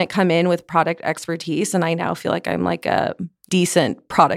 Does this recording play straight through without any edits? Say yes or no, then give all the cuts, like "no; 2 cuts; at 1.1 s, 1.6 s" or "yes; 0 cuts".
no; 1 cut; at 3.3 s